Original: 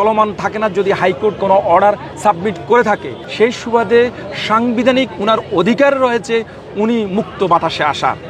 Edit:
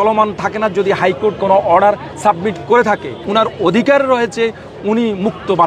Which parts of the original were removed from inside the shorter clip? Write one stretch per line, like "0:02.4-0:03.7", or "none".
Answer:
0:03.2-0:05.1